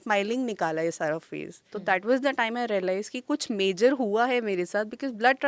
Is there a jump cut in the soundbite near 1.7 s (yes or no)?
yes